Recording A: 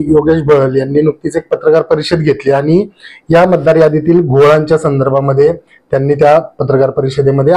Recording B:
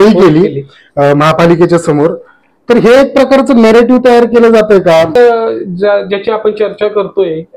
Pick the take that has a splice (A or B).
B